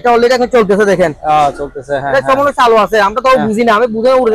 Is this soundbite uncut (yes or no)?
yes